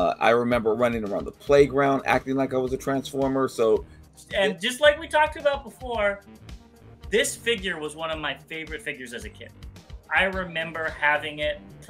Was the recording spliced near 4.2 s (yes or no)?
yes